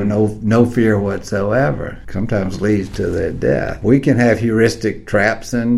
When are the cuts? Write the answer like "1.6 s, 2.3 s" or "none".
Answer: 2.0 s, 3.8 s